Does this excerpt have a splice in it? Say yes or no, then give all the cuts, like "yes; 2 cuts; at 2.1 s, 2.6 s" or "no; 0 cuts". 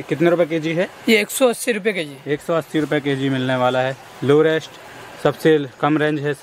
no; 0 cuts